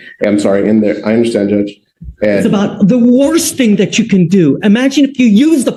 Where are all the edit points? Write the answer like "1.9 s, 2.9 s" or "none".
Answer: none